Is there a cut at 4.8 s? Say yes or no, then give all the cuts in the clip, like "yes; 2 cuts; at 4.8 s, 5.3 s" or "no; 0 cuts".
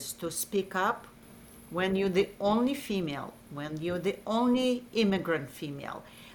no; 1 cut; at 1.1 s